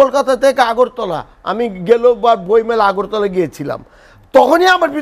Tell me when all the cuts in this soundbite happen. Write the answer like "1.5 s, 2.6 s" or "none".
none